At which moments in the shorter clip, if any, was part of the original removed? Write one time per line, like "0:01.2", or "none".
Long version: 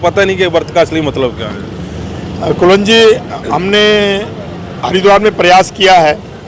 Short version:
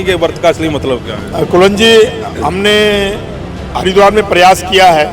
0:01.2